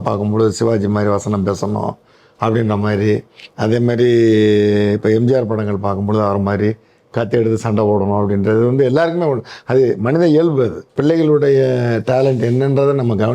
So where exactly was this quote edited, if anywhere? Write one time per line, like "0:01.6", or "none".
0:10.9